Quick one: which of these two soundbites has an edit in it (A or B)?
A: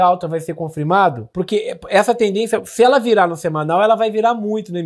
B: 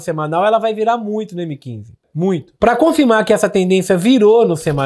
A